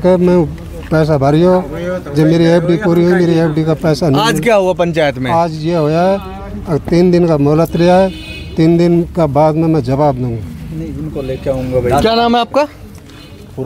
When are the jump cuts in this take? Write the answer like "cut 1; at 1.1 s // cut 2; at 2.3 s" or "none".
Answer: none